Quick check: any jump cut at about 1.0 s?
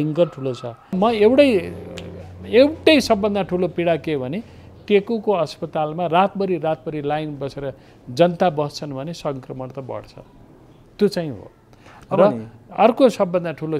yes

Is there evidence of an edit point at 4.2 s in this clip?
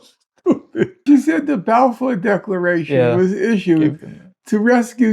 no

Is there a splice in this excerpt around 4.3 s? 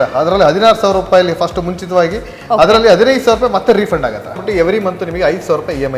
yes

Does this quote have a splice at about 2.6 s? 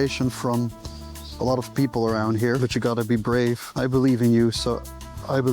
yes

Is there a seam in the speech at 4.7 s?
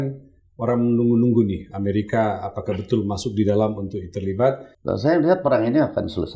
yes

